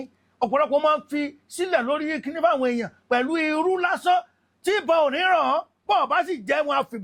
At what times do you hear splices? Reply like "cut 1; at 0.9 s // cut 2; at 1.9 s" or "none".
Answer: none